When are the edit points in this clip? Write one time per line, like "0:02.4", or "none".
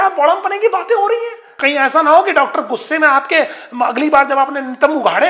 0:01.5